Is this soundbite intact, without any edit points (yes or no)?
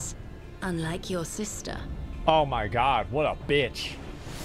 yes